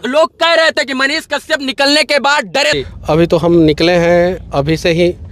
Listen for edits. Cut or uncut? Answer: cut